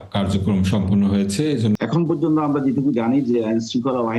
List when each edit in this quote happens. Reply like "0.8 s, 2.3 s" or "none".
1.8 s